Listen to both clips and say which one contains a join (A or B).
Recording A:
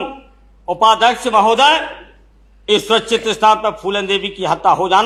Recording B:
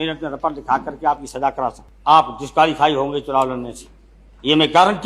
B